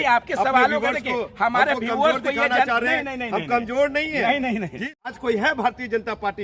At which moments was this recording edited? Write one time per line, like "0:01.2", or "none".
0:05.1